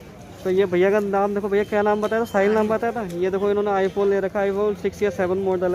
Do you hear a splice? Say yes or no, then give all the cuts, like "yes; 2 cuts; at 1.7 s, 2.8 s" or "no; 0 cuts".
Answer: no; 0 cuts